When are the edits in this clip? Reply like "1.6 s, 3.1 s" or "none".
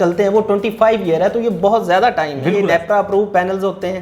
2.6 s